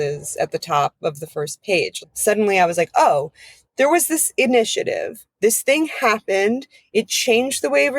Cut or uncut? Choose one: cut